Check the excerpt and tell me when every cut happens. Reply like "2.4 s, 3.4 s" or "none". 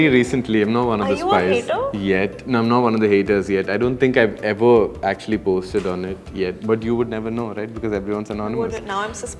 none